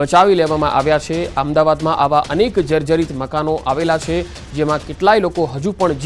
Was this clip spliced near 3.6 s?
no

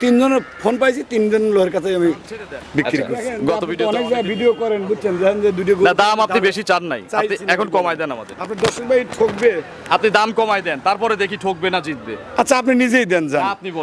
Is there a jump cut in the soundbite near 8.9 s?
no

